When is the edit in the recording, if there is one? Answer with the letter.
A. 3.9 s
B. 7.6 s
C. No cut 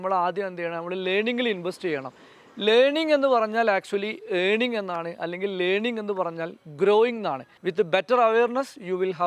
B